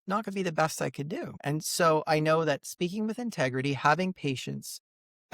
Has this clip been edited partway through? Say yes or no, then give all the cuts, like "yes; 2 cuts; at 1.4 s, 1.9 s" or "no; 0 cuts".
yes; 1 cut; at 1.3 s